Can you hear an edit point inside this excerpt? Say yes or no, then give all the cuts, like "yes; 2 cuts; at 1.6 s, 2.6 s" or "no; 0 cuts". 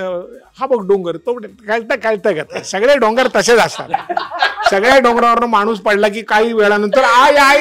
no; 0 cuts